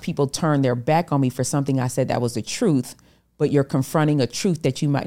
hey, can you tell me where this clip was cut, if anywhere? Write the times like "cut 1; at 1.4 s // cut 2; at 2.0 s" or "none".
none